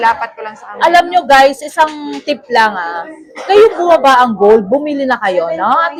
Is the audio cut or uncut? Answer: uncut